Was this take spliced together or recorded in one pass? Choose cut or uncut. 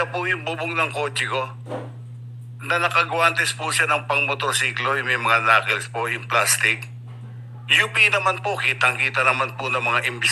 uncut